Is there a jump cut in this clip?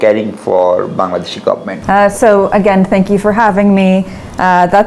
yes; 1 cut; at 1.7 s

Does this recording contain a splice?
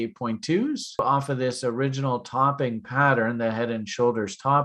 yes; 1 cut; at 1.0 s

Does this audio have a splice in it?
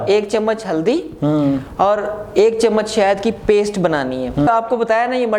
yes; 1 cut; at 4.5 s

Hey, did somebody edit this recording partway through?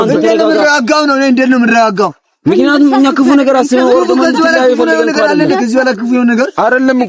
no; 0 cuts

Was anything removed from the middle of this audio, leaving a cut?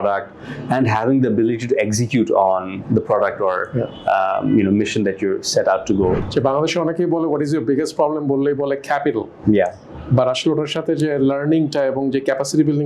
yes; 1 cut; at 6.2 s

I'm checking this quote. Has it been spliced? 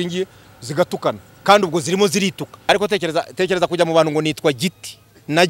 yes; 1 cut; at 2.5 s

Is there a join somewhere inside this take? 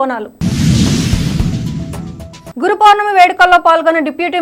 no; 0 cuts

